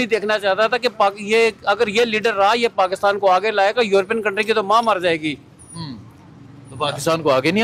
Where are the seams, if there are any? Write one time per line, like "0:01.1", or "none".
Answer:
none